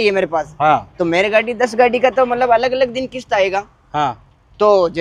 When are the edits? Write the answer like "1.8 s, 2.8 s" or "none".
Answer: none